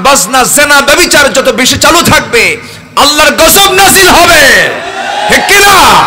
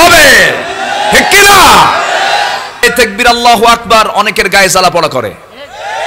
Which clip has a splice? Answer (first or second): second